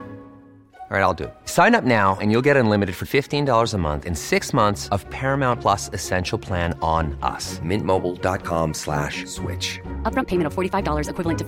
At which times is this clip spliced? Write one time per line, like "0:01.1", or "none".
none